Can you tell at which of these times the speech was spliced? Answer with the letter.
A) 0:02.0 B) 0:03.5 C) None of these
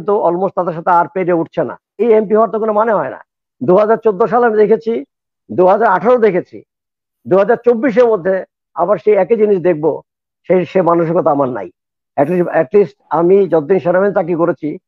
A